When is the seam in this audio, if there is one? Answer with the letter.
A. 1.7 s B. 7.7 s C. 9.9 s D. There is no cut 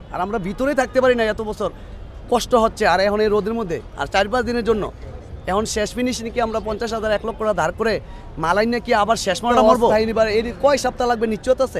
C